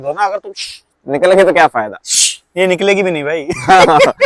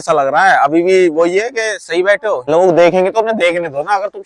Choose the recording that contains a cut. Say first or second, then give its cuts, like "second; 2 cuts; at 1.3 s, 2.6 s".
second; 1 cut; at 2.4 s